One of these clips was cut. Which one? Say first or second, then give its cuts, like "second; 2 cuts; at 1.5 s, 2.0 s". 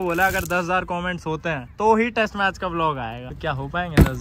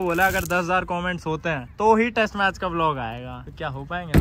first; 1 cut; at 3.3 s